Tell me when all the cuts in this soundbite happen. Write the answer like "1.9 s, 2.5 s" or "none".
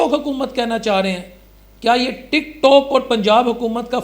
none